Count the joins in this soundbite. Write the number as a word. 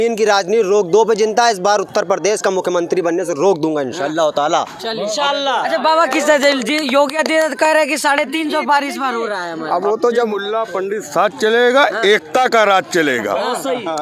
zero